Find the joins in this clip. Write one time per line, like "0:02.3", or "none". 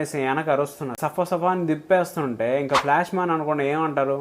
0:01.0